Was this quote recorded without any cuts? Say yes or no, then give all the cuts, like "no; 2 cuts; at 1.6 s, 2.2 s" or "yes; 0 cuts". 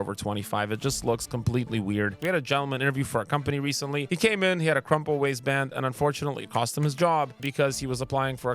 no; 3 cuts; at 2.2 s, 4.0 s, 7.4 s